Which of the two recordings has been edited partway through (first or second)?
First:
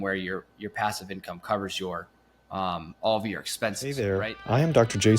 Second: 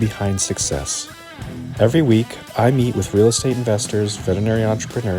first